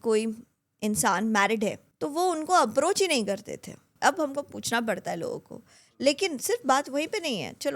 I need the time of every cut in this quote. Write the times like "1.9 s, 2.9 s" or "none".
1.9 s, 3.8 s

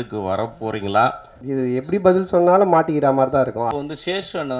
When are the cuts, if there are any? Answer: 1.3 s, 3.6 s

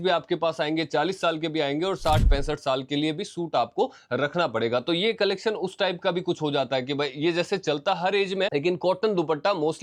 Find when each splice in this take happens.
none

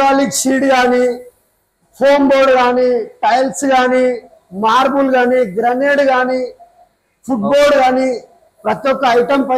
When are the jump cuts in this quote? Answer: none

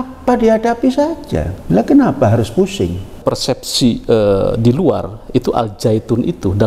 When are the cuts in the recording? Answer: 1.5 s, 3.2 s

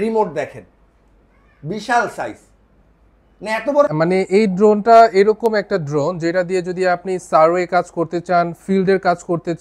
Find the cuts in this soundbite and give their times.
3.9 s

